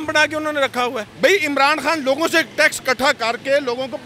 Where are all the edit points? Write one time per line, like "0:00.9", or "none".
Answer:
0:01.0